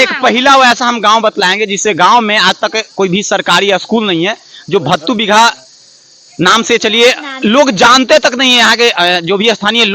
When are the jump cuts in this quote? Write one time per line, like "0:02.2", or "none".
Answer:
none

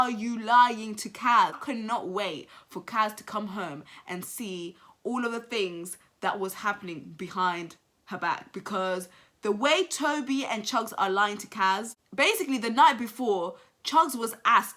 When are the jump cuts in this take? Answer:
none

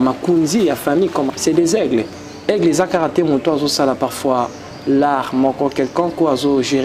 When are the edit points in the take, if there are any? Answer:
0:01.3

